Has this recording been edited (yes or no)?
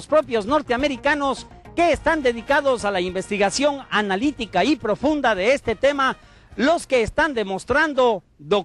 yes